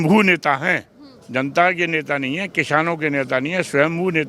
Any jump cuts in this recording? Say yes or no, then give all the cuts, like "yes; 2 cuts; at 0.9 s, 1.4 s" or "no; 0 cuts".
no; 0 cuts